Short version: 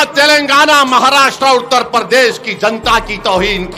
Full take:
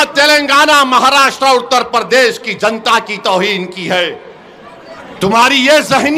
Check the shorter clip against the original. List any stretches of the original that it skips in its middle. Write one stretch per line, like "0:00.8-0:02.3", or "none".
none